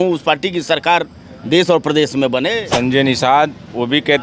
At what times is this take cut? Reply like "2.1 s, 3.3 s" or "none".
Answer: 2.5 s